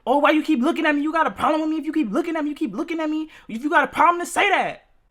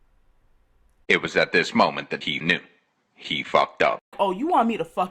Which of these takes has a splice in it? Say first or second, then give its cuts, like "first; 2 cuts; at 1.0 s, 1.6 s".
second; 1 cut; at 4.1 s